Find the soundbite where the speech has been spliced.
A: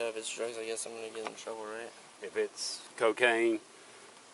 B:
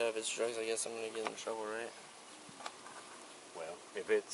A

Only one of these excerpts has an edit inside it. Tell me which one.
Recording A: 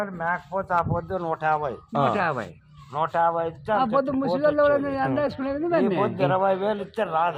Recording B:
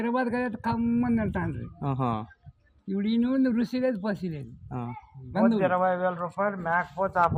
B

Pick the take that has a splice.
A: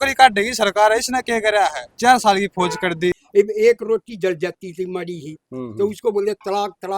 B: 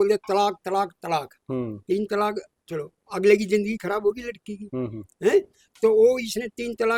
A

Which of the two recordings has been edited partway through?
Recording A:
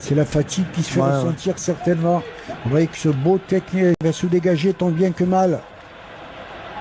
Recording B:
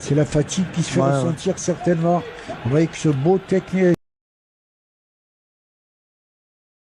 A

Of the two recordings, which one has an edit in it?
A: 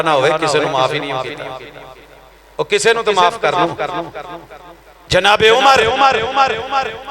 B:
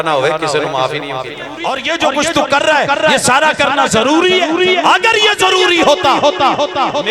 B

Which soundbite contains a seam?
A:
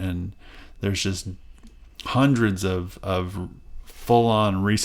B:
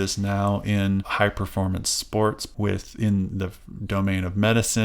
B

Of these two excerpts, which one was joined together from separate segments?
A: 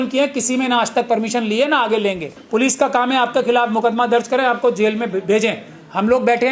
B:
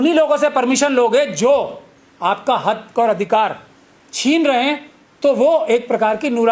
A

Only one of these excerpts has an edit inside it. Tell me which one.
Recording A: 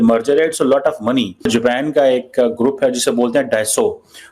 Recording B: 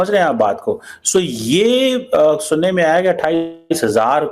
A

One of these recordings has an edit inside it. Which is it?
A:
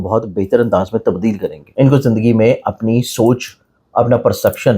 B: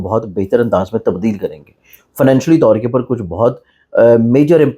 A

